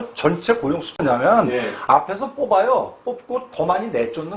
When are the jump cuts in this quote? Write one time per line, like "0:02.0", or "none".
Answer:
0:00.9